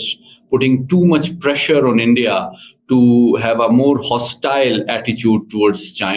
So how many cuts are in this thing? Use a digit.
0